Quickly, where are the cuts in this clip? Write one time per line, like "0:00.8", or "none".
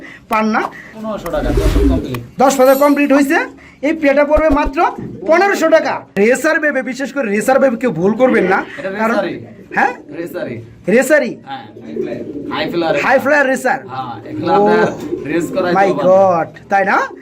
0:01.0
0:06.2